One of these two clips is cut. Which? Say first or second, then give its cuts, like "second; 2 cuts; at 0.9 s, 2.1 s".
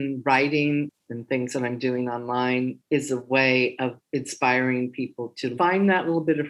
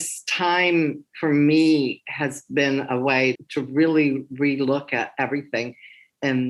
first; 2 cuts; at 0.9 s, 5.5 s